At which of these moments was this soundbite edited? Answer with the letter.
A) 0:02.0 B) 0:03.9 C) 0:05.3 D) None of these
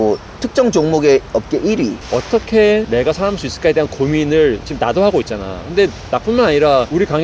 A